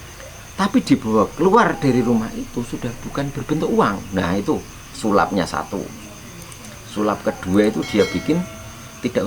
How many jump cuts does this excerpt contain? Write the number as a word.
zero